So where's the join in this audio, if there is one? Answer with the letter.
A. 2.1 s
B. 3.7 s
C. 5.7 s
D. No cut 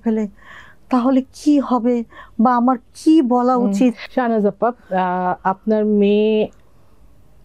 D